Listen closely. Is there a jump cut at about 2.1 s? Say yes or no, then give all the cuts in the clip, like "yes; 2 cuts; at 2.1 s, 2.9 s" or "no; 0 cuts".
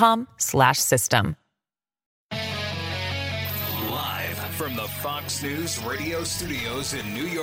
yes; 2 cuts; at 2.1 s, 3.7 s